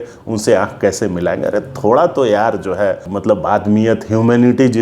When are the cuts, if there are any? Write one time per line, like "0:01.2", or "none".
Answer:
0:03.1